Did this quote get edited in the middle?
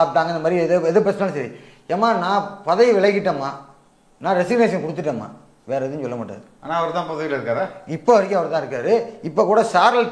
no; 0 cuts

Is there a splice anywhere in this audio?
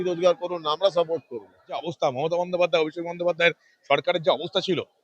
yes; 1 cut; at 1.9 s

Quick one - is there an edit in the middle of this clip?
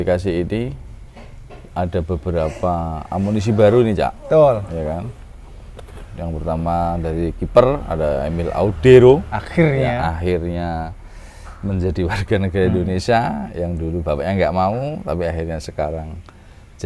no; 0 cuts

